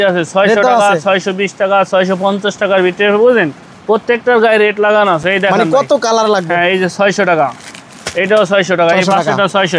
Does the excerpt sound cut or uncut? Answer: uncut